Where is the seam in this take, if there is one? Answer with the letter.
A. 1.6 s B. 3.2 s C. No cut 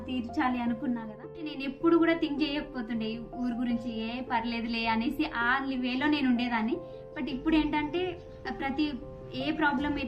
A